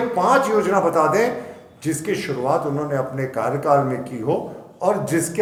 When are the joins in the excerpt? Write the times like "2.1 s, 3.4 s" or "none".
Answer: none